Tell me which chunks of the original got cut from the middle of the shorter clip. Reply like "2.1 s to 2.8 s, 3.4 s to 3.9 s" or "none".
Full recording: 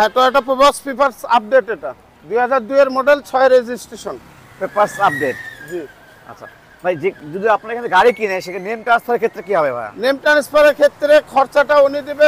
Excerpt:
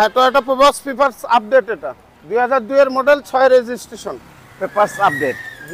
none